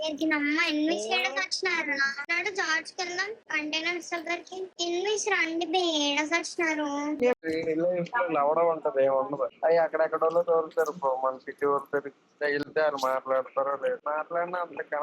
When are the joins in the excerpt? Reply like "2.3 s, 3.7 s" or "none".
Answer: 7.3 s